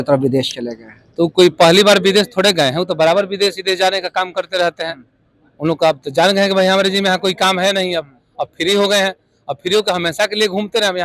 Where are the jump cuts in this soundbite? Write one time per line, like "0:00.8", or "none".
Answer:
none